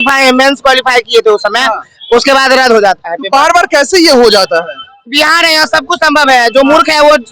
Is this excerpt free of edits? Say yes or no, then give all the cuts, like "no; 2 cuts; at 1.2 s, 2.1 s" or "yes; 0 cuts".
yes; 0 cuts